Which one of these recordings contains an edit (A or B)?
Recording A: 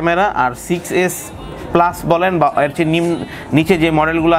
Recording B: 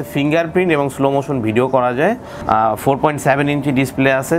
B